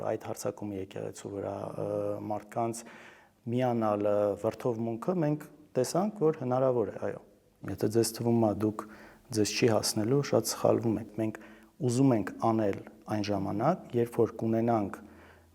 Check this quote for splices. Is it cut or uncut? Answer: cut